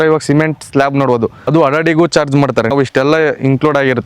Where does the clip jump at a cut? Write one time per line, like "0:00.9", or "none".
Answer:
0:01.4
0:02.7